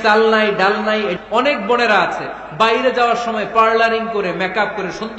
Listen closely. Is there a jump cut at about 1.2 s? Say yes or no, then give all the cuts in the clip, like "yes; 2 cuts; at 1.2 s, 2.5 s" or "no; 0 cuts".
yes; 1 cut; at 1.2 s